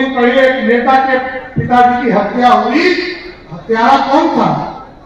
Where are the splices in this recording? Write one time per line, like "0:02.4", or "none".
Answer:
none